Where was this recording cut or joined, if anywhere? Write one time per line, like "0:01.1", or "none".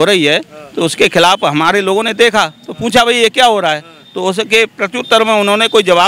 none